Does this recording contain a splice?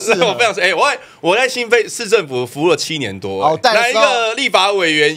yes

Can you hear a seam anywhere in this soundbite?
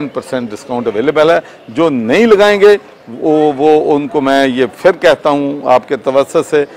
no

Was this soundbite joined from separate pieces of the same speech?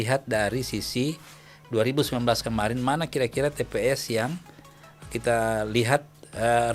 no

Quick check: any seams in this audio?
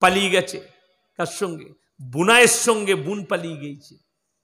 no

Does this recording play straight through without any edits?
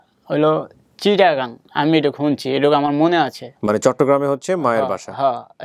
yes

